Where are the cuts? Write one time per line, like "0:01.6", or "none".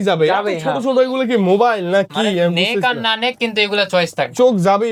none